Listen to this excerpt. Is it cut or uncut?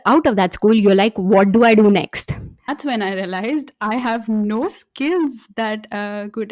cut